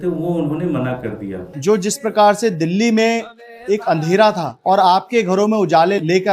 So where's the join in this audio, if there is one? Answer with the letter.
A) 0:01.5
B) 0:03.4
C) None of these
A